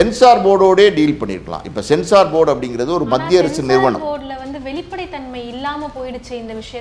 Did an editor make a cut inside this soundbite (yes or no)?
no